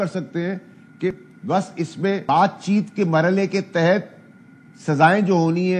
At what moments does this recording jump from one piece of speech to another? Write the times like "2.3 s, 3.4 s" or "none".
2.2 s